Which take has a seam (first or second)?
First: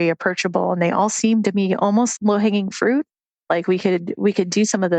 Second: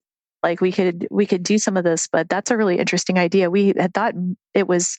first